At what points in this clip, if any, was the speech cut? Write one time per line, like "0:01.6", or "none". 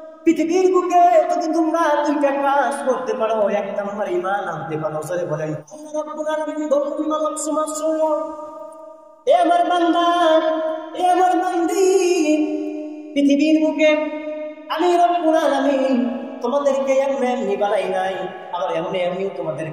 0:05.6